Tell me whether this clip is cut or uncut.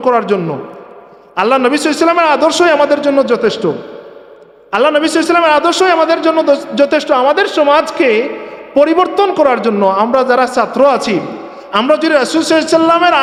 uncut